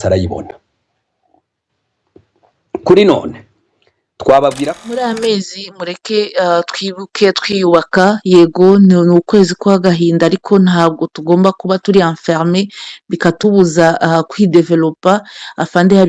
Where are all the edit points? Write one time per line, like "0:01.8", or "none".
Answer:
0:05.0